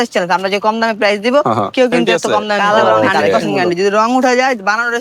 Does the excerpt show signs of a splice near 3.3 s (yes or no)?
yes